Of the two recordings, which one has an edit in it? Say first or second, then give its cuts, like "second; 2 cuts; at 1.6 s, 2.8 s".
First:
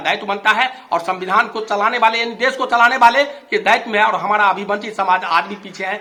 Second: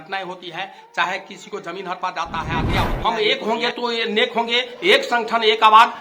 second; 1 cut; at 2.9 s